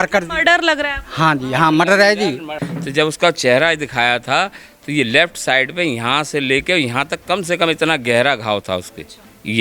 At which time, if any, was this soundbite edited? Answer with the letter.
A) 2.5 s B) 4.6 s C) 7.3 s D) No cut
A